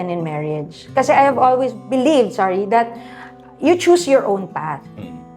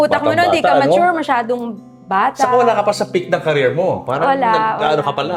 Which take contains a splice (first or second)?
first